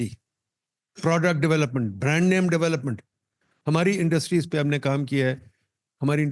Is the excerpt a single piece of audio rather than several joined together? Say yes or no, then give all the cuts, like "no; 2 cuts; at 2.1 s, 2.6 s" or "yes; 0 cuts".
yes; 0 cuts